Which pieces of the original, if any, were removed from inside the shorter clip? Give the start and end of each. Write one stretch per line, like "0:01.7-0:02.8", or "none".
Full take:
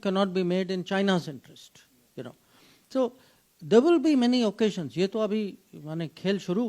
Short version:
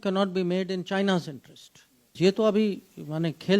0:02.1-0:04.9